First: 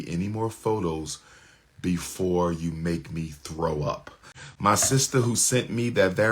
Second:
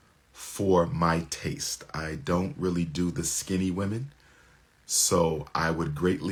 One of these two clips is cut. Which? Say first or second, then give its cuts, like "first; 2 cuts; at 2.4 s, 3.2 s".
first; 1 cut; at 4.4 s